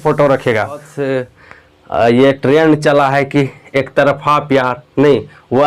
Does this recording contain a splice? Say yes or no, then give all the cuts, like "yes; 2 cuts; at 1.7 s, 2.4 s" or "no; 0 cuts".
yes; 1 cut; at 1.0 s